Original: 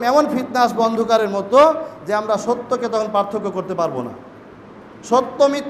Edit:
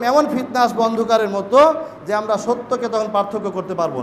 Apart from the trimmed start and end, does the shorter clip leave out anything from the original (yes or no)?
no